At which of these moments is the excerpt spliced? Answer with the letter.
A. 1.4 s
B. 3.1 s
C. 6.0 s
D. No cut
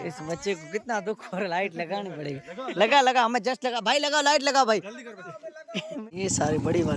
C